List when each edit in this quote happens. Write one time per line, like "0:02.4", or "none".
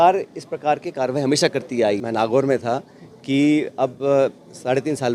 0:02.0

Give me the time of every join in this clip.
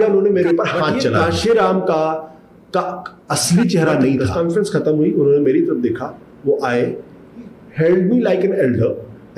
0:01.2
0:04.3

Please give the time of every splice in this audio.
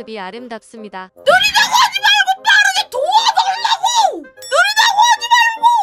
0:04.3

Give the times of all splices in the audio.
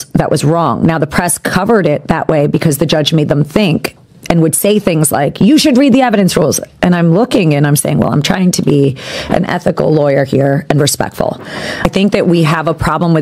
0:11.8

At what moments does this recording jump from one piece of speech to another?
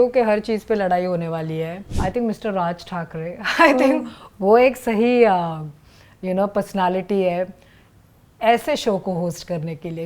0:01.8

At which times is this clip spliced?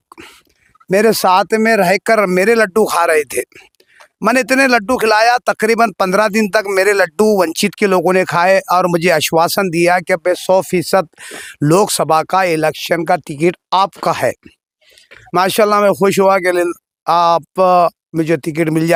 none

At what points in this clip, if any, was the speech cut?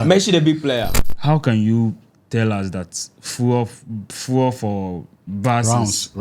0:01.0

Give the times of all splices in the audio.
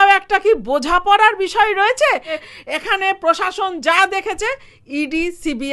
0:02.4

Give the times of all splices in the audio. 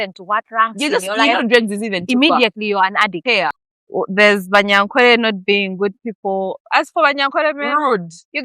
0:03.6

